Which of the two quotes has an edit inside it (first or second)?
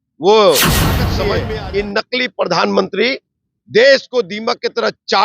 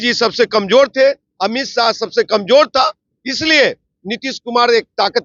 first